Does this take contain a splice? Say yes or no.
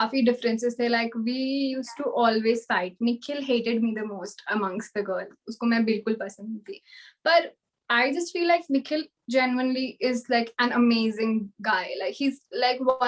no